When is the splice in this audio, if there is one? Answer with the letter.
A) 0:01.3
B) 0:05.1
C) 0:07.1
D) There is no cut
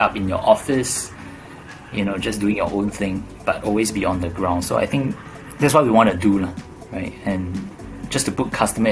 B